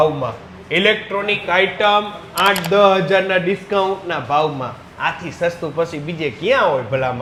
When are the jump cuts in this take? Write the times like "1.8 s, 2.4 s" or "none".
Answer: none